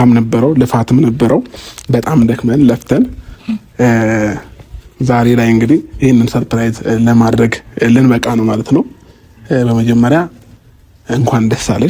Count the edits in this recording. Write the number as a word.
zero